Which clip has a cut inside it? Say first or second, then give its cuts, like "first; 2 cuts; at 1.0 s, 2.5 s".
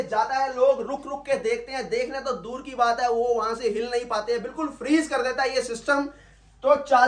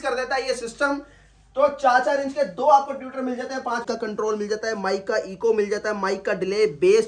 second; 1 cut; at 3.8 s